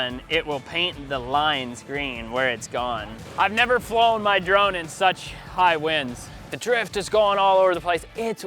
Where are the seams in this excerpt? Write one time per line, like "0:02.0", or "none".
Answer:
0:03.2
0:06.5